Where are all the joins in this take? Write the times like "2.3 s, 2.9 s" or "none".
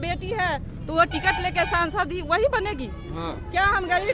none